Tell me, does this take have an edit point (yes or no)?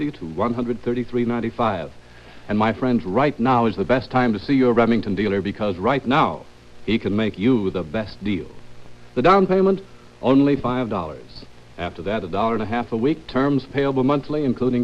no